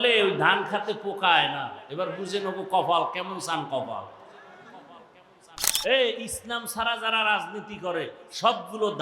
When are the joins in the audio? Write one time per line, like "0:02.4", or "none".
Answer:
0:05.7